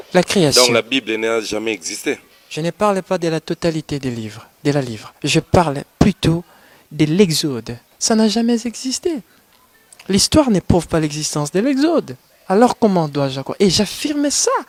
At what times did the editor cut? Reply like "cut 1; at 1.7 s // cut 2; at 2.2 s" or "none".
none